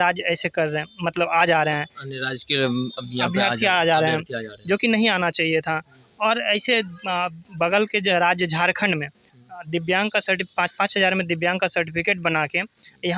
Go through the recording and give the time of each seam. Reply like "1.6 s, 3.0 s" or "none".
none